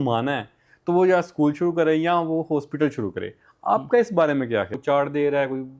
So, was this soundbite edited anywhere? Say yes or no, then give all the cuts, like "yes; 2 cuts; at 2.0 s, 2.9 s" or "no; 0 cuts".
yes; 1 cut; at 4.7 s